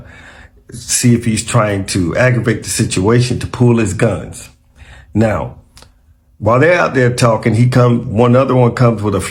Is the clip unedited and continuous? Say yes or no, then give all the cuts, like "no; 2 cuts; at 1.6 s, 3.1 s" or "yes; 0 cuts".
yes; 0 cuts